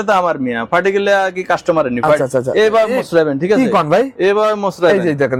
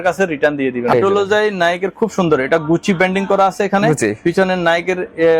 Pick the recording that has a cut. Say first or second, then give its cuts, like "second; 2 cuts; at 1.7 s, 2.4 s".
second; 1 cut; at 0.9 s